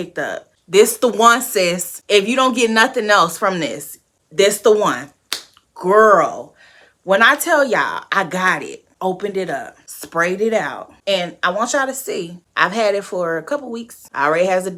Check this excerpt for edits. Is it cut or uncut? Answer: uncut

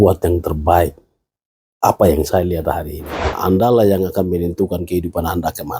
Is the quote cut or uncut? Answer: cut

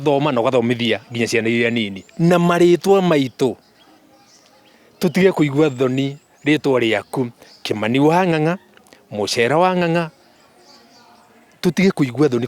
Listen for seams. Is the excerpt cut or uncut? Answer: uncut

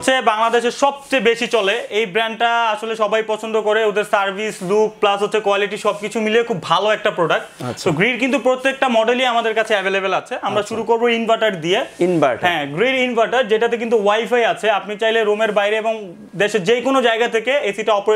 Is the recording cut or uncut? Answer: uncut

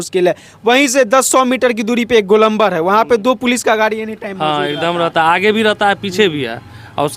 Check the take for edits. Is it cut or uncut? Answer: uncut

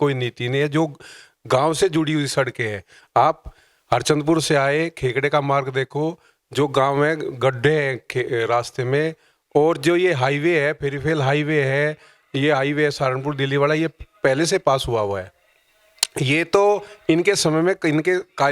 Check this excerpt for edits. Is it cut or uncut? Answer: uncut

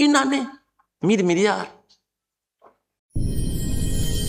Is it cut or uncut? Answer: uncut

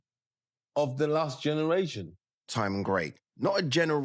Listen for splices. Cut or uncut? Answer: cut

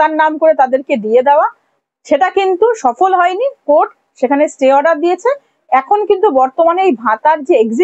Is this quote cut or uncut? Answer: uncut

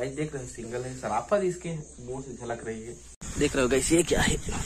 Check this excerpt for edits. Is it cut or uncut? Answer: cut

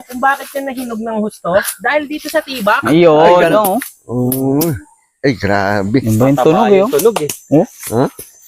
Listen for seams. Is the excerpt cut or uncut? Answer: cut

